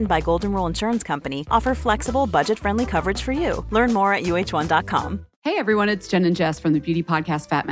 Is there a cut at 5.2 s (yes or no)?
yes